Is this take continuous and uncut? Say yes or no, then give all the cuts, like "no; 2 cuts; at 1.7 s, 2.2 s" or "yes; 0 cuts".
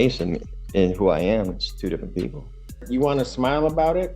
no; 1 cut; at 2.8 s